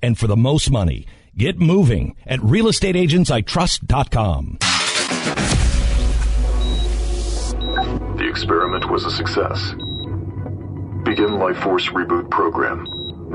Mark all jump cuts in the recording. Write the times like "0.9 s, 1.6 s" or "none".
4.6 s